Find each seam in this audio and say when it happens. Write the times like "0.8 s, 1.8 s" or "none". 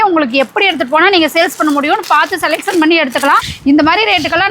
3.5 s